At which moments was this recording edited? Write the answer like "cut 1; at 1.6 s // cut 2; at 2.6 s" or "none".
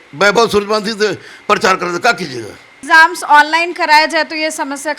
cut 1; at 2.8 s